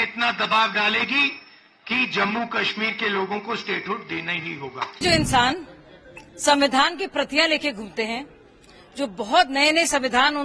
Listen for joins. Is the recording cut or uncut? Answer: cut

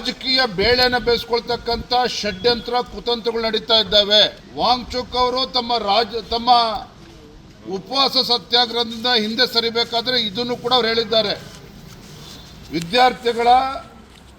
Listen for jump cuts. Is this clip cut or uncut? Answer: cut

